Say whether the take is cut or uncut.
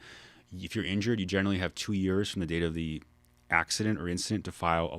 uncut